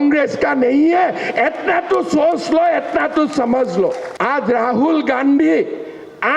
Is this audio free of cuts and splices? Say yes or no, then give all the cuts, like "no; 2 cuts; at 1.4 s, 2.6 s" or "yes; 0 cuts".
no; 1 cut; at 4.1 s